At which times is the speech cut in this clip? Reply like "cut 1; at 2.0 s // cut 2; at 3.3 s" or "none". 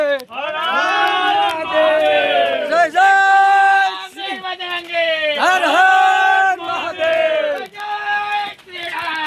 none